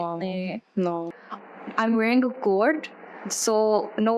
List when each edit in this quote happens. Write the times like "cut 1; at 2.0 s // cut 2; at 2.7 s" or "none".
cut 1; at 1.1 s